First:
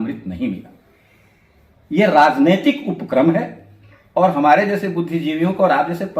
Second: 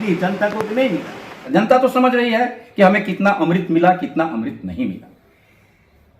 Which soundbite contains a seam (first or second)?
second